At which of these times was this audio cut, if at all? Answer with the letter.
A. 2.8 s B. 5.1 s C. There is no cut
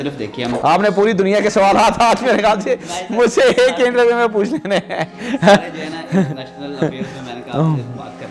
C